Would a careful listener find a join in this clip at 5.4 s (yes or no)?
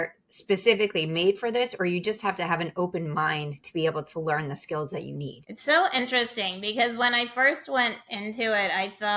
yes